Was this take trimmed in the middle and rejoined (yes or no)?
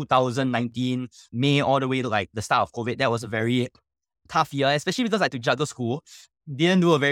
no